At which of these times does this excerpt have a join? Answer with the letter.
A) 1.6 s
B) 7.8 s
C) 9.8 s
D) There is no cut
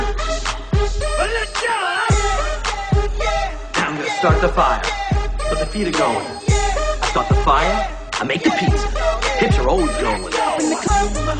B